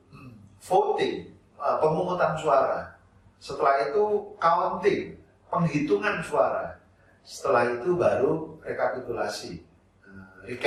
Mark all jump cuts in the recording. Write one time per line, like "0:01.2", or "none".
none